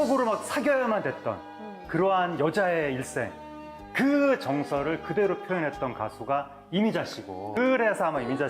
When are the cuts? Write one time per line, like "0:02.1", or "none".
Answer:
0:07.6